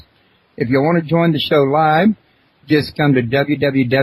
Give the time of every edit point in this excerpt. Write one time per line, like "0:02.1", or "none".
0:02.4